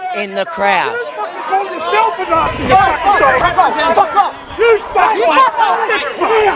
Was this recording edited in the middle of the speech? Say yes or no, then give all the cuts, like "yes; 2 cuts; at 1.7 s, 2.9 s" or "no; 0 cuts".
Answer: yes; 1 cut; at 1.2 s